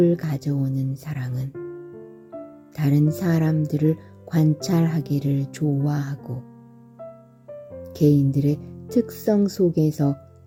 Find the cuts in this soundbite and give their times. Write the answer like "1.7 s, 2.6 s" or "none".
none

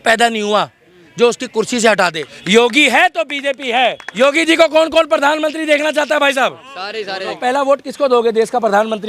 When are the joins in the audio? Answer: 2.3 s, 4.1 s, 7.4 s

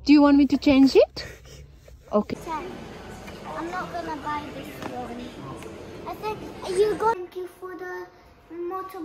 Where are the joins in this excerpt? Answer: 2.4 s, 7.2 s

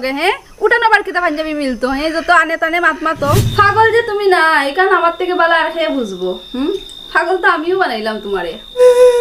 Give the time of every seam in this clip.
3.5 s

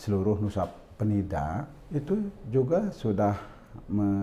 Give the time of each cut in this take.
1.8 s

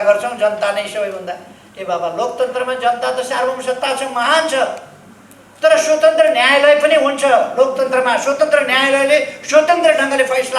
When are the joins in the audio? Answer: none

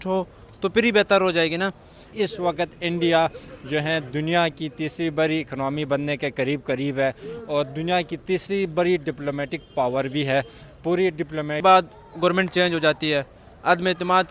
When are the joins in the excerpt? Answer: 2.0 s, 11.6 s

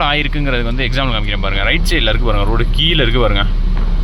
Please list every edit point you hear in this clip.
none

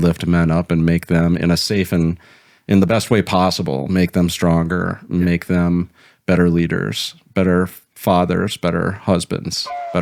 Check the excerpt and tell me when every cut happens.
none

